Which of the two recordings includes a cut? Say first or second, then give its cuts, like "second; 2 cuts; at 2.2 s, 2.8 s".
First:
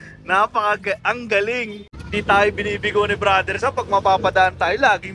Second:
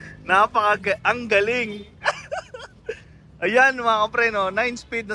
first; 1 cut; at 1.8 s